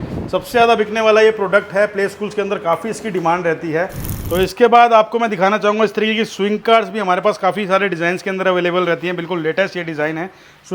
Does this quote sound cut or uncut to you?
cut